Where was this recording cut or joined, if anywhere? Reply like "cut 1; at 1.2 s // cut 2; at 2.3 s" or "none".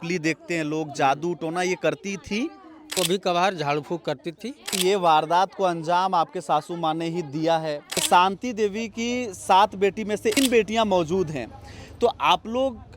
cut 1; at 2.9 s // cut 2; at 4.7 s // cut 3; at 8.0 s // cut 4; at 10.4 s